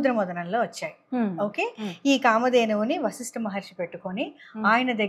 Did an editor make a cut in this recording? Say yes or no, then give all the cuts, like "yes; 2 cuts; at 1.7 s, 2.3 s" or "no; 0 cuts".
no; 0 cuts